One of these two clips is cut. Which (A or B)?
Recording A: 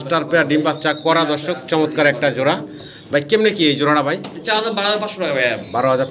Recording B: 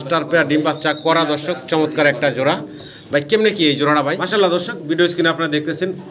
B